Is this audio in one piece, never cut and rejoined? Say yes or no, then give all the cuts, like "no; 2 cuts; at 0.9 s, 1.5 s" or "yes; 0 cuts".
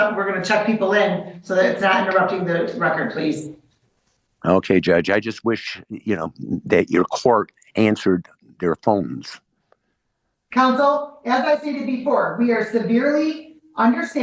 yes; 0 cuts